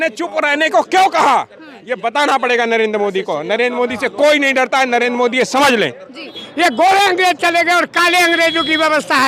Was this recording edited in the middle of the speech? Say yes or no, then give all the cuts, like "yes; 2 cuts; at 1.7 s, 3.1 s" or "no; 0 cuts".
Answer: yes; 1 cut; at 6.4 s